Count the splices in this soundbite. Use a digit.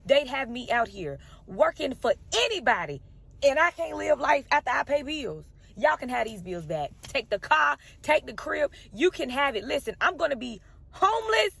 0